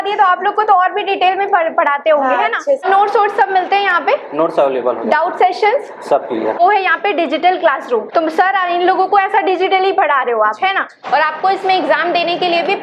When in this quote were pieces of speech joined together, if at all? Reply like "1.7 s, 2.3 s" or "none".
2.8 s, 6.5 s, 8.1 s, 10.9 s

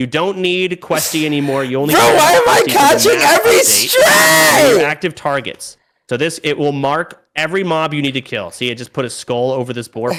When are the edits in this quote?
none

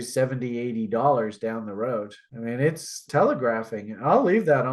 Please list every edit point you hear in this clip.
3.0 s

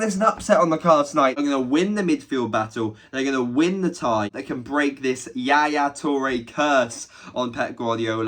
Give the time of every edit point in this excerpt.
1.4 s, 4.4 s

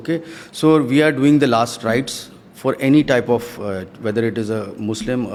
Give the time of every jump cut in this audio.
none

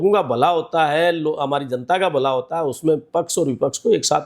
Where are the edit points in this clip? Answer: none

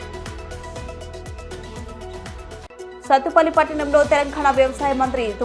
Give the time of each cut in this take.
none

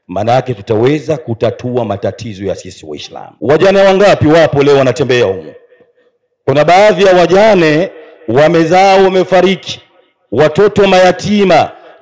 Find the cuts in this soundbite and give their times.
3.2 s

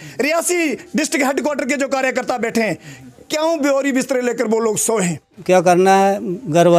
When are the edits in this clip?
5.3 s

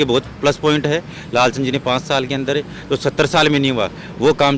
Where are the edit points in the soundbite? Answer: none

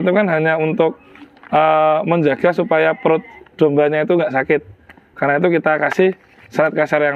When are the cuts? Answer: none

